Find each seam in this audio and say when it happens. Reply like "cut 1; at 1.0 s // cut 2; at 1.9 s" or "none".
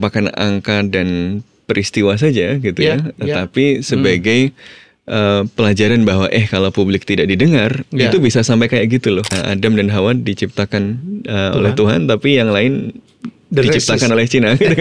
cut 1; at 9.3 s